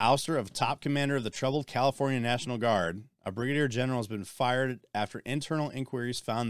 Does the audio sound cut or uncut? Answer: uncut